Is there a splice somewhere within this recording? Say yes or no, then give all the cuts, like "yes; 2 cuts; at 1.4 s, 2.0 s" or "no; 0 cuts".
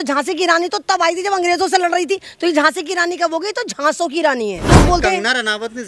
yes; 1 cut; at 4.7 s